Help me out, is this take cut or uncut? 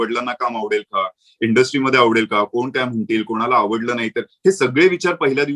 uncut